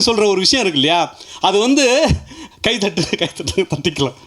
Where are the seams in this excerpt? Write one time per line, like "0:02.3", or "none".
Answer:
none